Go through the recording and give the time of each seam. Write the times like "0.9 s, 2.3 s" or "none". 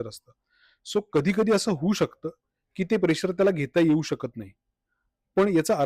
none